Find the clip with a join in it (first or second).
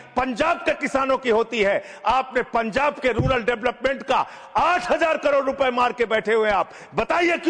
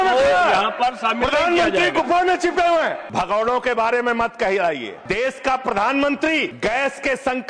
second